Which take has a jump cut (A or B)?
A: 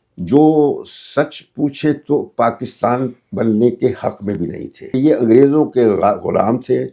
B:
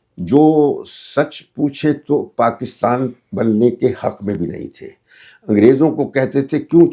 A